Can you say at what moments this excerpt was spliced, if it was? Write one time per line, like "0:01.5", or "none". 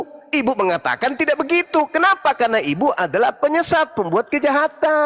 none